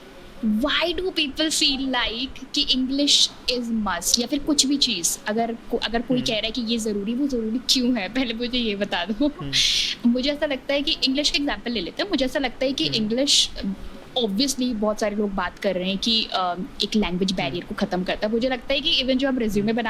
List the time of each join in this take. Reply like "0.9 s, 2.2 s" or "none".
none